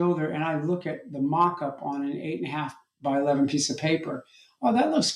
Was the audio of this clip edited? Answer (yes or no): no